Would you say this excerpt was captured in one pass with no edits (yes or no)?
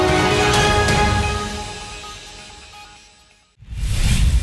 no